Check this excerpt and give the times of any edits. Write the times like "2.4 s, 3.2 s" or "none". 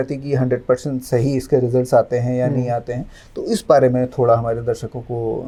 none